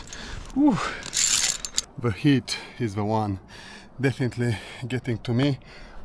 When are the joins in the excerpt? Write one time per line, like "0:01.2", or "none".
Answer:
none

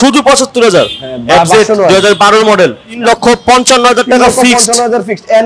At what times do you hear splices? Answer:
0:02.9

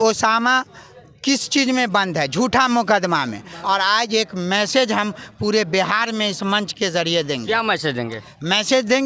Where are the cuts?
0:03.5

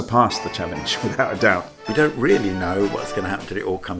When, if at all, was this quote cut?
0:01.9

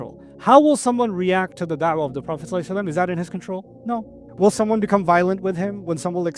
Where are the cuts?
0:04.0

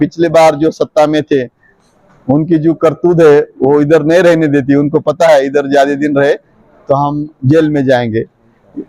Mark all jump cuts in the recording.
none

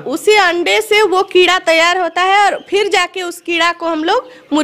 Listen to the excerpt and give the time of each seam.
none

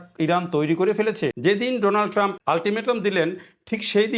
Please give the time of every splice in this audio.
0:01.4
0:02.3

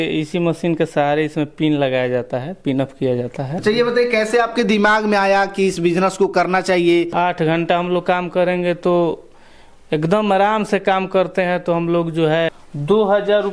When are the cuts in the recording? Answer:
0:03.5
0:07.1
0:12.5

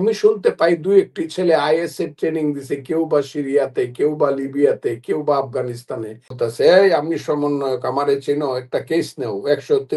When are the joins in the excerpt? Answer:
0:06.3

